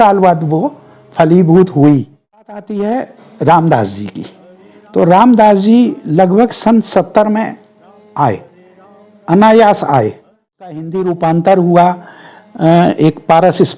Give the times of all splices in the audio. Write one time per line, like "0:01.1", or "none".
0:02.6
0:10.9

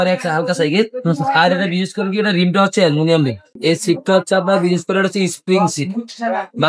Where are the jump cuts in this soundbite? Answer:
0:03.5

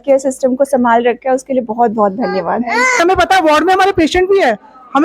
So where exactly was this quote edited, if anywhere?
0:03.0

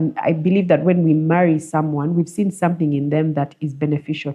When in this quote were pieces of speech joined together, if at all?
none

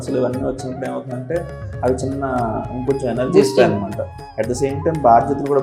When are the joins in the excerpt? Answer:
none

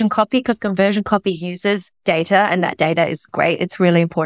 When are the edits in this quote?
0:01.9
0:03.3

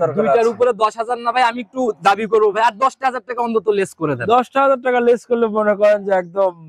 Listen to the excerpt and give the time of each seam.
none

